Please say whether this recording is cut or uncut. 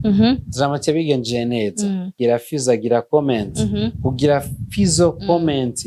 cut